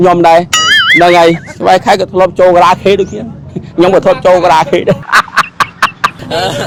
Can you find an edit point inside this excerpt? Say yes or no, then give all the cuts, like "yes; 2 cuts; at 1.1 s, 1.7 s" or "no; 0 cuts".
no; 0 cuts